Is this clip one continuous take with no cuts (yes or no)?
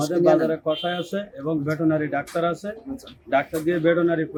yes